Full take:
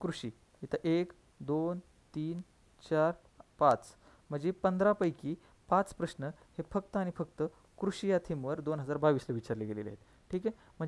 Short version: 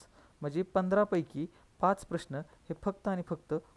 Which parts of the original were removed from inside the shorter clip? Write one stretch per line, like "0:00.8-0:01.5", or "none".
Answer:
none